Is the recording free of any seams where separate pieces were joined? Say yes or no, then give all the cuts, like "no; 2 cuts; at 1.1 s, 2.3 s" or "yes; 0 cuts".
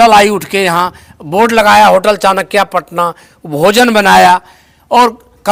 yes; 0 cuts